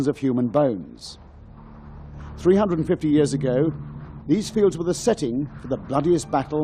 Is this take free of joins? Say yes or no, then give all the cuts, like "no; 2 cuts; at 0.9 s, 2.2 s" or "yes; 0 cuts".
yes; 0 cuts